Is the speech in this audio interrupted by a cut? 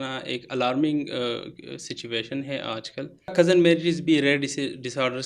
yes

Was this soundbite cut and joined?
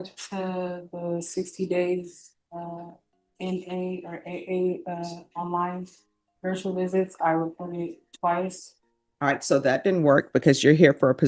no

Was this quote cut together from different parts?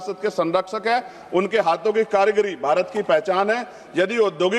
no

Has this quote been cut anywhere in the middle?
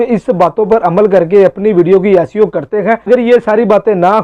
yes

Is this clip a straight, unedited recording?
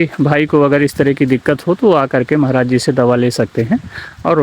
yes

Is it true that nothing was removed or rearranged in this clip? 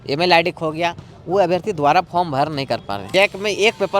no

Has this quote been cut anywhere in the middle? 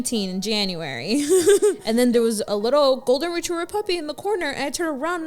yes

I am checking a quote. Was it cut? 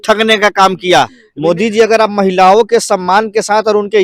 yes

